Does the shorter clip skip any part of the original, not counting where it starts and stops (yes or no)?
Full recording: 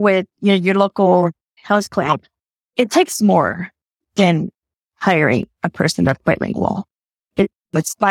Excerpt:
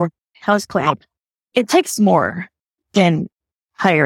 no